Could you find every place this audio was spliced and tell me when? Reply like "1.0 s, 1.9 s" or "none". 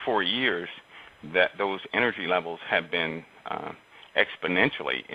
3.1 s